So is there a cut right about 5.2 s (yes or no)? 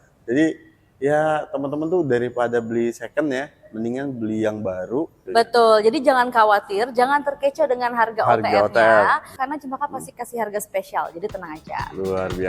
yes